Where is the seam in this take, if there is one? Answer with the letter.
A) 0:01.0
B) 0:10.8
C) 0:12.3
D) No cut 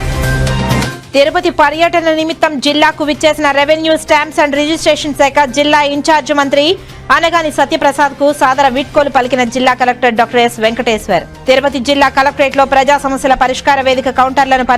A